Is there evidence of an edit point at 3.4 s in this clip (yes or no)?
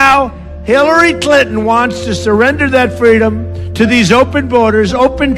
no